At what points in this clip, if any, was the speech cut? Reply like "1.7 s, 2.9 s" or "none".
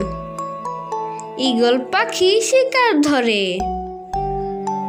3.7 s